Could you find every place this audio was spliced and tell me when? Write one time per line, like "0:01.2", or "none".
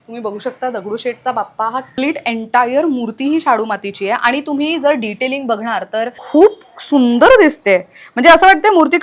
0:01.9
0:06.2